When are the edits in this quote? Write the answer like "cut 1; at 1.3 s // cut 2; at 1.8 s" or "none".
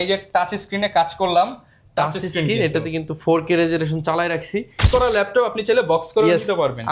cut 1; at 4.8 s

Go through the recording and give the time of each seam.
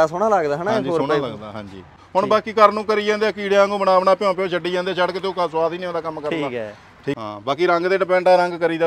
cut 1; at 2.0 s // cut 2; at 7.1 s

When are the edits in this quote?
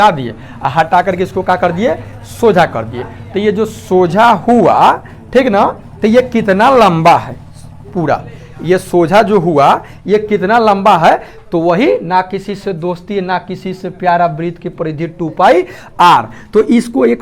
none

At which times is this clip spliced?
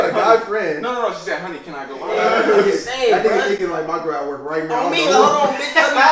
cut 1; at 2.1 s

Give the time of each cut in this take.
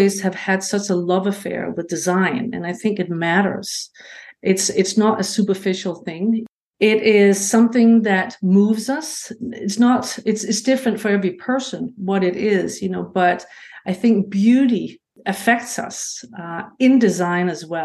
cut 1; at 6.5 s

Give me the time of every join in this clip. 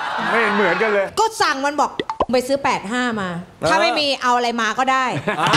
cut 1; at 1.1 s

